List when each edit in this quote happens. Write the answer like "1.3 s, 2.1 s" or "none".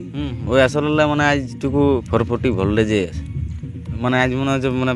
4.0 s